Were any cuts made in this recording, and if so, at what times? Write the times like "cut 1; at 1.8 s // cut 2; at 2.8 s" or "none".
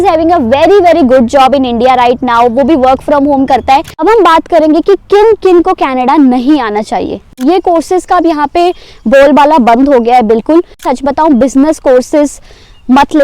cut 1; at 3.9 s // cut 2; at 7.3 s // cut 3; at 10.8 s